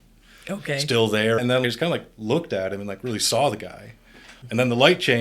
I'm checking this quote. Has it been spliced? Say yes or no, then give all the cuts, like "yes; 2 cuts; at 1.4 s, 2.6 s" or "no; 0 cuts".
yes; 2 cuts; at 1.4 s, 4.3 s